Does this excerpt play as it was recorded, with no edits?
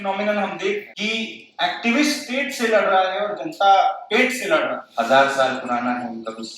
no; 2 cuts; at 0.9 s, 4.8 s

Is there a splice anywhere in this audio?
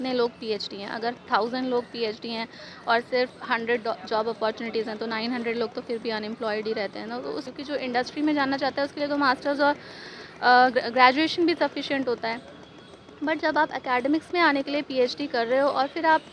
yes; 1 cut; at 7.5 s

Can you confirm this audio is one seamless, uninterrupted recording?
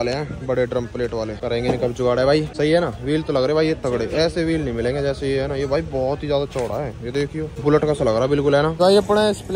no; 4 cuts; at 1.4 s, 2.5 s, 7.5 s, 8.8 s

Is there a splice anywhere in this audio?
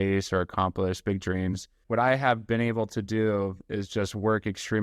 yes; 1 cut; at 1.8 s

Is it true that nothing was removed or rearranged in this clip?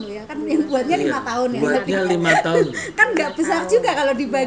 yes; 0 cuts

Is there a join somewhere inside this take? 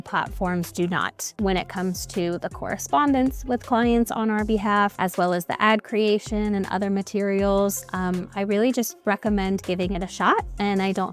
no; 0 cuts

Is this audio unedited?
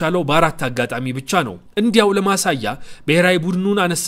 yes; 0 cuts

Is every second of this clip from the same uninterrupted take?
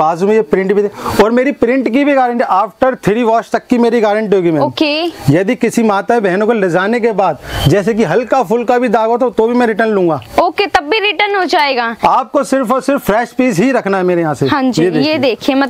yes; 0 cuts

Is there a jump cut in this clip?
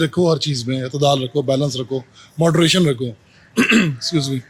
no; 0 cuts

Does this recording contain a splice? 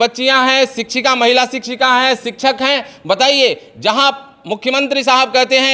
no; 0 cuts

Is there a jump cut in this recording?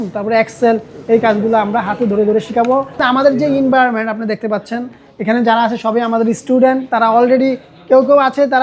yes; 1 cut; at 3.0 s

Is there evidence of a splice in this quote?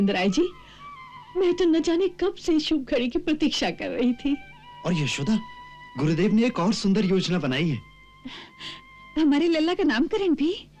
no; 0 cuts

